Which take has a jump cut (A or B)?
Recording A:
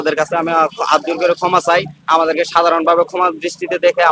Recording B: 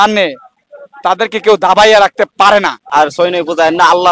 B